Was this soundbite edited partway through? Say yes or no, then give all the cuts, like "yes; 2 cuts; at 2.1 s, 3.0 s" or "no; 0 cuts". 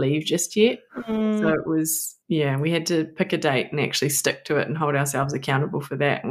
no; 0 cuts